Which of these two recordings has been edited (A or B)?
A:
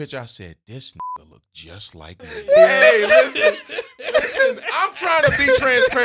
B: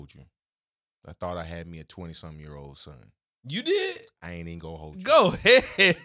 A